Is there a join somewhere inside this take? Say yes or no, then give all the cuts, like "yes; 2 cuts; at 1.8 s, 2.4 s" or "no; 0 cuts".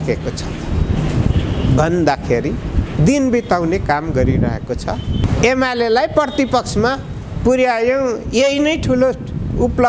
yes; 1 cut; at 5.2 s